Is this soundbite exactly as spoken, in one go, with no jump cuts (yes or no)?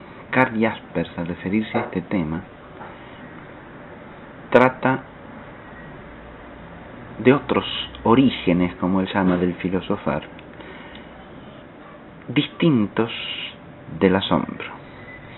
no